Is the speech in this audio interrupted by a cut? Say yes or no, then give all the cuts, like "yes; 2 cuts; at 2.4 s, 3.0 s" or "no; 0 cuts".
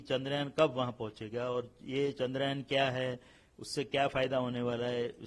no; 0 cuts